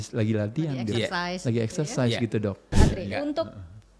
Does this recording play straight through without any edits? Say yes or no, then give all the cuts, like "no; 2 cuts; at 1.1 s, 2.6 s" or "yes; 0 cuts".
no; 1 cut; at 2.7 s